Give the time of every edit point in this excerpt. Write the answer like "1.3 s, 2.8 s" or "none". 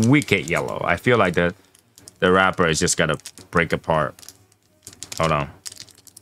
none